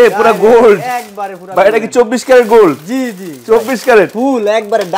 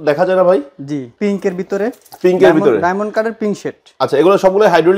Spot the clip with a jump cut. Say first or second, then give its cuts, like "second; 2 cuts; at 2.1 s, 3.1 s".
second; 1 cut; at 1.1 s